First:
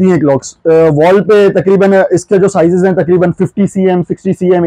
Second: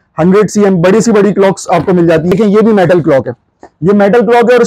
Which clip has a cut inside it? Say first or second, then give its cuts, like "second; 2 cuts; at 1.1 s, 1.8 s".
second; 1 cut; at 2.3 s